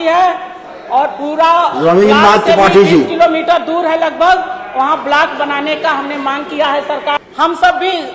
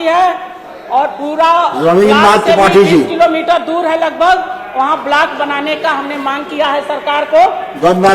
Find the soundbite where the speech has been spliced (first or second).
first